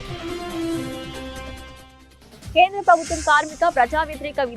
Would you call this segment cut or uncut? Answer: cut